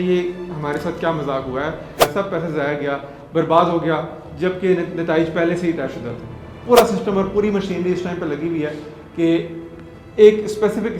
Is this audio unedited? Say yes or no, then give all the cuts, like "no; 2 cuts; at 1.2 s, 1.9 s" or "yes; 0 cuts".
no; 2 cuts; at 1.8 s, 6.6 s